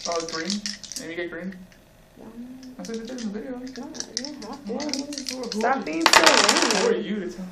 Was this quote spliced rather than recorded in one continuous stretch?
yes; 1 cut; at 3.7 s

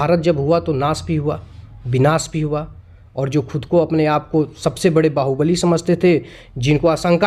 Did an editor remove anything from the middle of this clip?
no; 0 cuts

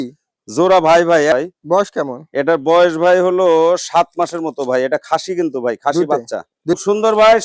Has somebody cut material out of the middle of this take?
yes; 2 cuts; at 1.3 s, 6.8 s

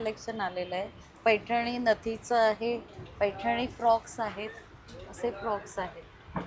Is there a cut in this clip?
no; 0 cuts

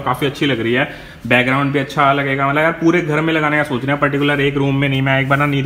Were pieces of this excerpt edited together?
no; 0 cuts

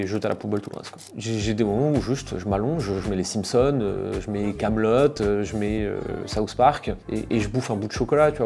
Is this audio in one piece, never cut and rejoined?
no; 1 cut; at 1.1 s

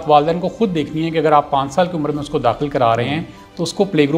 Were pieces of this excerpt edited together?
no; 0 cuts

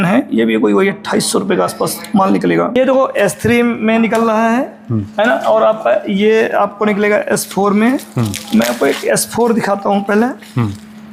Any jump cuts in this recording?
no; 0 cuts

